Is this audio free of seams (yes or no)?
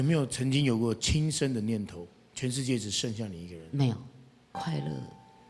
no